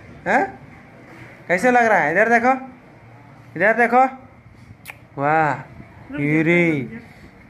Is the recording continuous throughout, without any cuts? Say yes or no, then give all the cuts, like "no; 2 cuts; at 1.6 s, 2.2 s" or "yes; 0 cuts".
yes; 0 cuts